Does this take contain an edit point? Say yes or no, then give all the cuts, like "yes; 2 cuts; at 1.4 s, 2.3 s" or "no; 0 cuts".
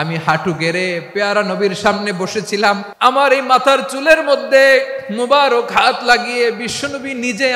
yes; 1 cut; at 2.9 s